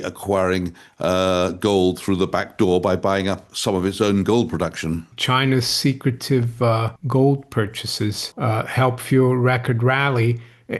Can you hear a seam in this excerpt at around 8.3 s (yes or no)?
yes